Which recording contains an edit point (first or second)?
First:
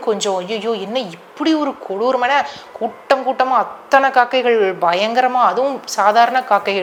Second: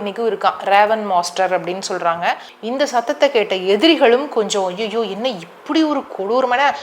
second